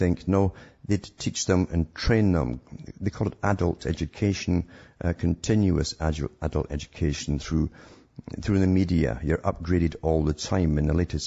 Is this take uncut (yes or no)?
no